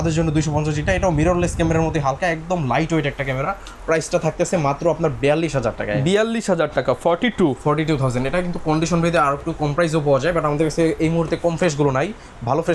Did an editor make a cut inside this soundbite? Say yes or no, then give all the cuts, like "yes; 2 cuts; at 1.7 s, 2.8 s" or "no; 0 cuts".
no; 0 cuts